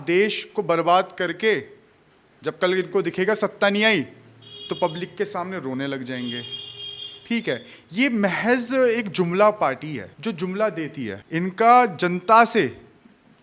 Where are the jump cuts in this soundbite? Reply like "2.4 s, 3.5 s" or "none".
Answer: 10.1 s, 11.2 s